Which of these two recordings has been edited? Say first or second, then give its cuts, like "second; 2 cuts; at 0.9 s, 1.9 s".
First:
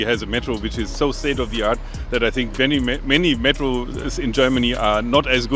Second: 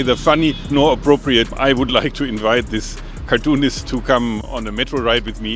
second; 1 cut; at 1.5 s